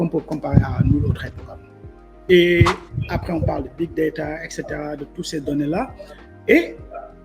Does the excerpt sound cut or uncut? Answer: cut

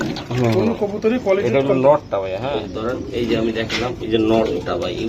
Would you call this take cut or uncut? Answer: cut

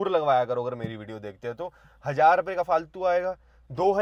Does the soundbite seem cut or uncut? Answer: uncut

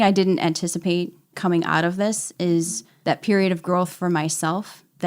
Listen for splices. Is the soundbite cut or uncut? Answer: cut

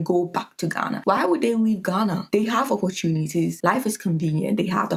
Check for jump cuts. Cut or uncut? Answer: uncut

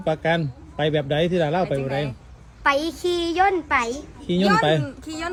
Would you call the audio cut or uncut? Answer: uncut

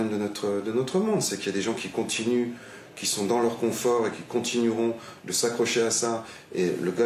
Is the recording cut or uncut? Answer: uncut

